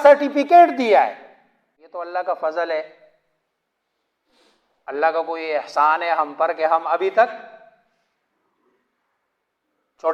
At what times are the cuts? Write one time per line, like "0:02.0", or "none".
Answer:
0:01.9

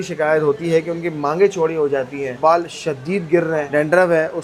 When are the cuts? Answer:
none

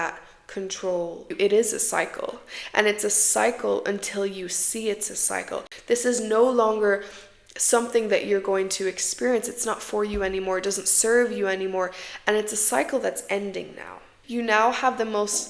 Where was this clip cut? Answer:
0:01.3
0:05.7
0:14.1

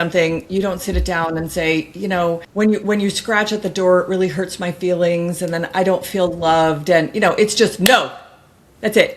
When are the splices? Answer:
0:02.5

